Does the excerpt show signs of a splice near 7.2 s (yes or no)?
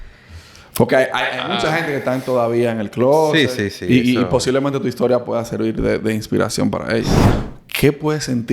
yes